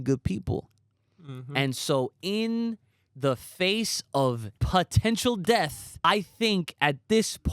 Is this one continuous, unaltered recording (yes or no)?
no